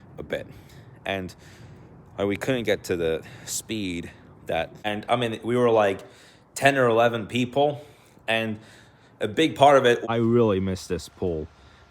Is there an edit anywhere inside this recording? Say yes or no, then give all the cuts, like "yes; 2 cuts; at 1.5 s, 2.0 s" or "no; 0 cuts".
yes; 2 cuts; at 4.9 s, 10.0 s